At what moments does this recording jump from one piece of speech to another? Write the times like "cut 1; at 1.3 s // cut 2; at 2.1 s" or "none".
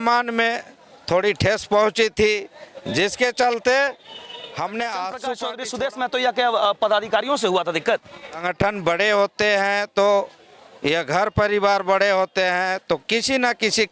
cut 1; at 5.6 s // cut 2; at 8.4 s